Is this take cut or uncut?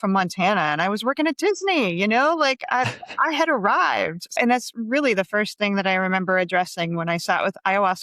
cut